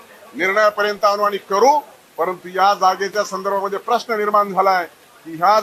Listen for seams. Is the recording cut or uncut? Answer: uncut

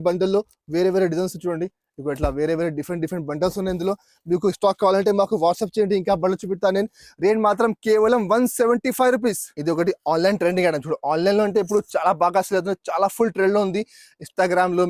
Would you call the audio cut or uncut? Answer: cut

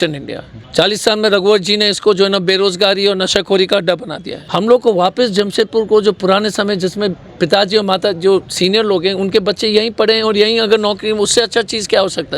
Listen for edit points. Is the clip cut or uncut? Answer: uncut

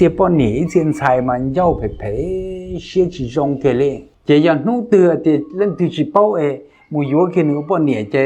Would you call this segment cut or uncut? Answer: cut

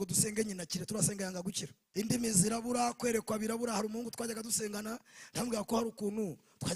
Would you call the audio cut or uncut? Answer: cut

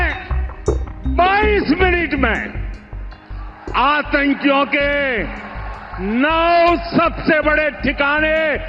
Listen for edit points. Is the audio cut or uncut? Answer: uncut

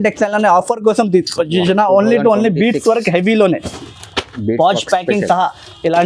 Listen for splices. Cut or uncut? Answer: uncut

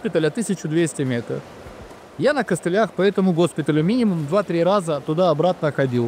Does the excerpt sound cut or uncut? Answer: uncut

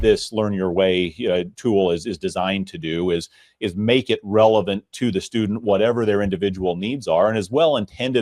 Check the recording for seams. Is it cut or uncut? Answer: uncut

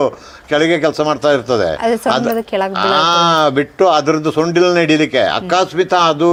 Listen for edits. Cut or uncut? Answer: uncut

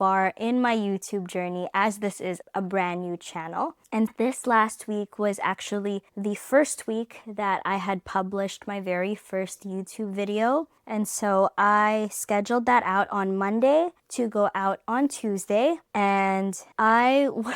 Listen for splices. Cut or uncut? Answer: uncut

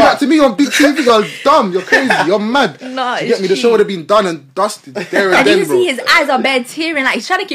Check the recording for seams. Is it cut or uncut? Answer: uncut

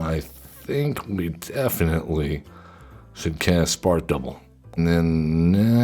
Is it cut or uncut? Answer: cut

